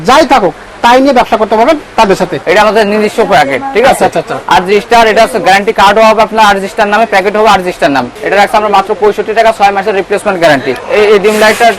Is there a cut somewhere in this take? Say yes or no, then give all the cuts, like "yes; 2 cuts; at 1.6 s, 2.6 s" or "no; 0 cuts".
yes; 3 cuts; at 2.4 s, 8.2 s, 10.8 s